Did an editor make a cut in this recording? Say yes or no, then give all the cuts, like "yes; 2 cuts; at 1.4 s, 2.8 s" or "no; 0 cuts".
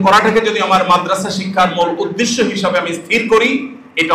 no; 0 cuts